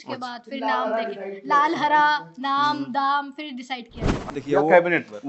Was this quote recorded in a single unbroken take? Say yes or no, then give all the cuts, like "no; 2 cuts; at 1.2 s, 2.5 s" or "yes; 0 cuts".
no; 1 cut; at 4.3 s